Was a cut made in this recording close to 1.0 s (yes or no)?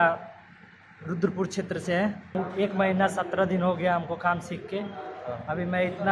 no